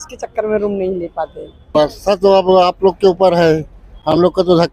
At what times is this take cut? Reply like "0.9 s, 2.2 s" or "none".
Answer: 1.8 s